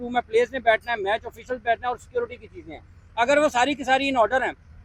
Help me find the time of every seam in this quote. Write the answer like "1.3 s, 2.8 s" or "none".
none